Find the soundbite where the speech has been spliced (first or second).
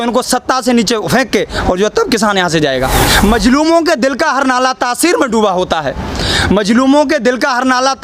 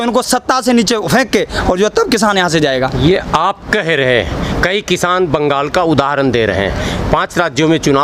first